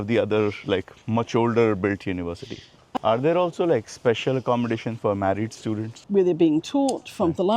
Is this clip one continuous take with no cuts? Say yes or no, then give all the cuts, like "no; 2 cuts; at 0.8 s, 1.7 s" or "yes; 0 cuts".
no; 2 cuts; at 2.9 s, 6.0 s